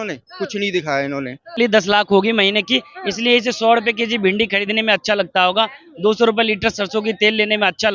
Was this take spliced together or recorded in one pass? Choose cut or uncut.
cut